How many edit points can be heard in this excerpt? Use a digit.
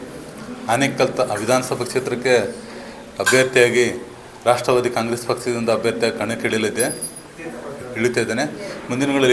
0